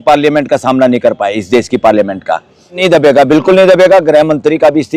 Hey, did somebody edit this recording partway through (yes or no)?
yes